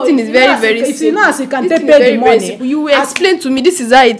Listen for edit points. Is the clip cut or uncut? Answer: uncut